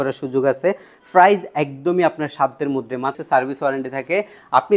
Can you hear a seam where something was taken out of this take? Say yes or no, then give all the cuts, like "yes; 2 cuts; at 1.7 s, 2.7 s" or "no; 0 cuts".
yes; 1 cut; at 3.2 s